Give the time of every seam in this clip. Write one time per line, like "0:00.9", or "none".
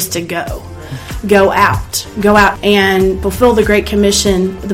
0:02.5